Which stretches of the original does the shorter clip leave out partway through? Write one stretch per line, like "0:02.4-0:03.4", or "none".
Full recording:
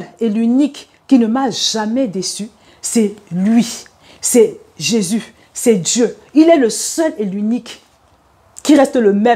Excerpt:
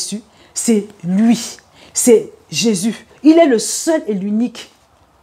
0:05.4-0:06.2